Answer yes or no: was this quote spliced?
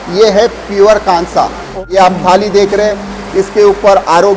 yes